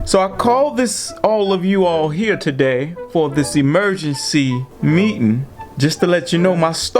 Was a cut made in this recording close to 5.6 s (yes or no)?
yes